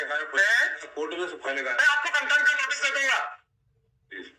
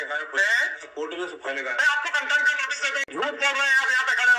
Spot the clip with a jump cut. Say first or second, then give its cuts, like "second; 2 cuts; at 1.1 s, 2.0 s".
second; 1 cut; at 3.0 s